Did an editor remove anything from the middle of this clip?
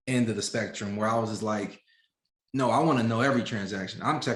no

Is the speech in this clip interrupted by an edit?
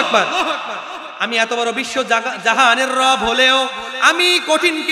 no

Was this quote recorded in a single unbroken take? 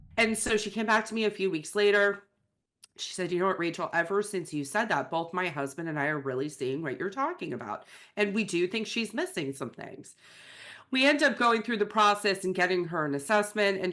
yes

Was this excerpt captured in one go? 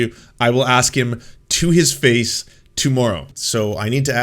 no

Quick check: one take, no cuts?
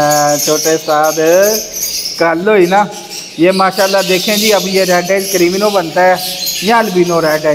yes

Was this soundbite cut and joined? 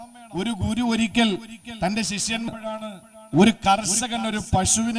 yes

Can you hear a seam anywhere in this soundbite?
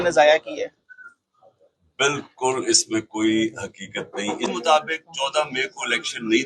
yes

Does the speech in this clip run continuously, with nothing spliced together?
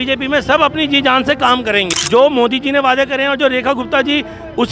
no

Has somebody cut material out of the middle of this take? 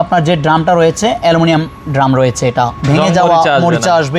no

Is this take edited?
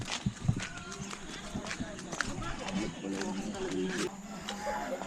yes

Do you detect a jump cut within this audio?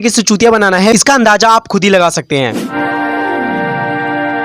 yes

